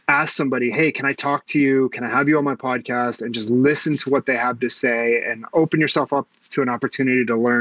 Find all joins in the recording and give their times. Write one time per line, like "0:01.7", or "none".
0:05.5